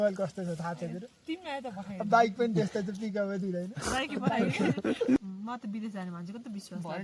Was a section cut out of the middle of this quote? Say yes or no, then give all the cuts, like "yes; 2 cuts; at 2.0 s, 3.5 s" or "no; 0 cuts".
yes; 1 cut; at 5.2 s